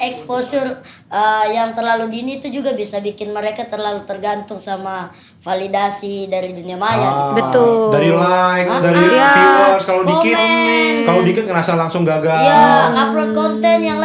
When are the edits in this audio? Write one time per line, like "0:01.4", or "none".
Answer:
none